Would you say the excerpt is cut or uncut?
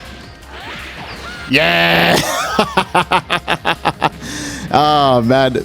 uncut